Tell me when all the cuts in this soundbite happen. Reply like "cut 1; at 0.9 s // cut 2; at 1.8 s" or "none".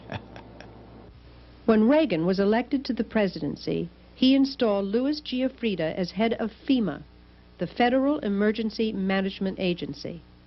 none

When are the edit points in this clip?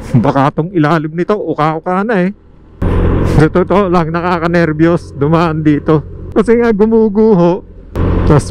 cut 1; at 2.8 s // cut 2; at 6.3 s

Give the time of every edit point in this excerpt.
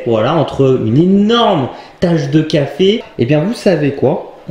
cut 1; at 3.1 s

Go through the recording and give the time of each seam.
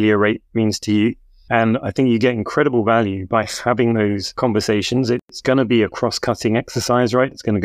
cut 1; at 1.3 s // cut 2; at 5.3 s

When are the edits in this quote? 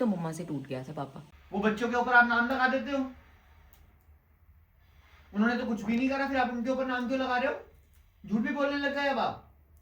cut 1; at 1.2 s

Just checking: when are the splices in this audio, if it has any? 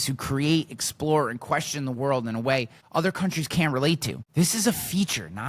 cut 1; at 2.8 s

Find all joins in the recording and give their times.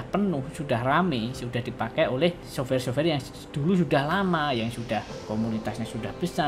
cut 1; at 2.4 s // cut 2; at 5.1 s

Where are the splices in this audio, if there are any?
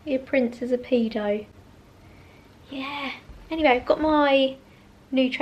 none

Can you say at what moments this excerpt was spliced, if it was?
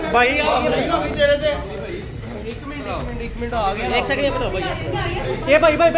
none

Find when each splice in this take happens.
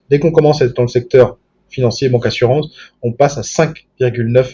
none

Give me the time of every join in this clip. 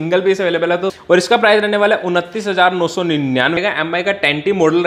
cut 1; at 0.9 s // cut 2; at 3.6 s

